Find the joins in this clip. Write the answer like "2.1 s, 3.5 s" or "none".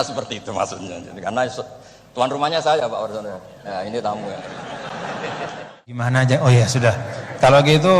6.1 s